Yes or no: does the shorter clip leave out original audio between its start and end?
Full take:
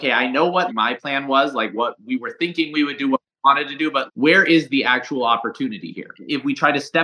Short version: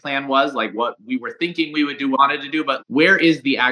yes